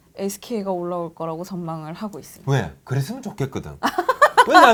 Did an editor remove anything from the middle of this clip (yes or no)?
no